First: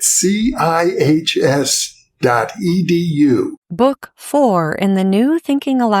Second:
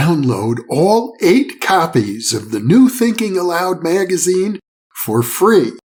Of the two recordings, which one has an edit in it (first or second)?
first